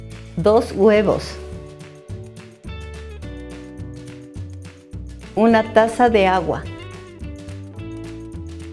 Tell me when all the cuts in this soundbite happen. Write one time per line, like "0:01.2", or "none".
none